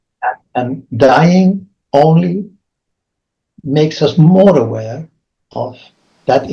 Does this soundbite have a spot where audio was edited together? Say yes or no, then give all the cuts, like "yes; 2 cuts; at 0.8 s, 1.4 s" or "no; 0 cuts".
no; 0 cuts